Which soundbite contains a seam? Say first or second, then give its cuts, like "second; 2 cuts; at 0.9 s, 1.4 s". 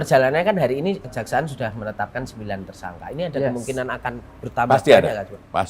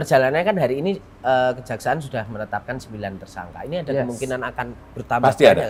first; 1 cut; at 1.1 s